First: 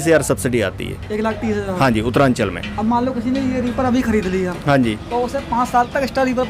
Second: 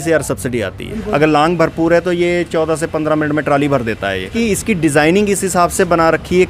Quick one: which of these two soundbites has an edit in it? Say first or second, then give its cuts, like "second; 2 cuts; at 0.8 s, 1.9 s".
second; 2 cuts; at 0.9 s, 4.3 s